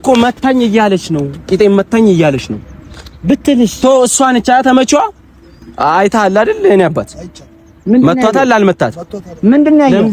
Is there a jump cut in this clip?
no; 0 cuts

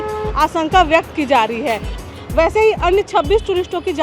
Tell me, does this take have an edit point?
yes; 1 cut; at 2.0 s

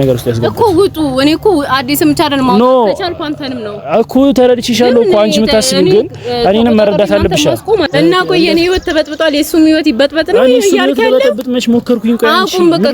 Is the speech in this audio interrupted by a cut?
yes; 1 cut; at 7.9 s

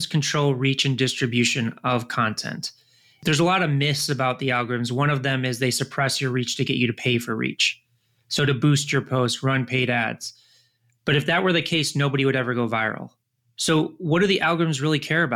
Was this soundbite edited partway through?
yes; 1 cut; at 3.2 s

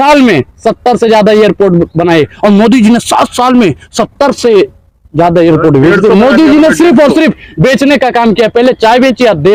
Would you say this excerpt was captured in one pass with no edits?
yes; 0 cuts

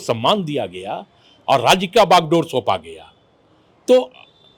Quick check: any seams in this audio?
no; 0 cuts

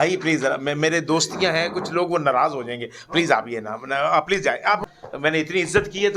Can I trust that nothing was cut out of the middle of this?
no; 1 cut; at 4.8 s

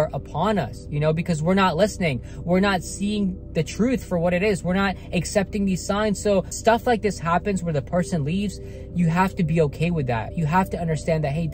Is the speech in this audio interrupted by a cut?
yes; 1 cut; at 6.5 s

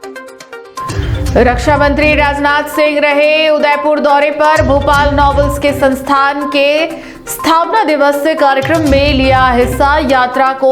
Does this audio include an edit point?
yes; 1 cut; at 0.9 s

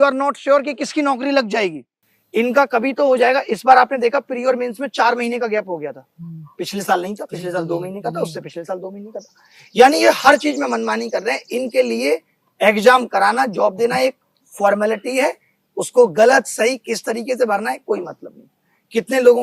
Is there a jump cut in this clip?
yes; 1 cut; at 1.9 s

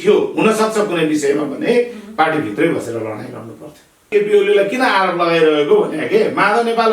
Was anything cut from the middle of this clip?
yes; 1 cut; at 4.1 s

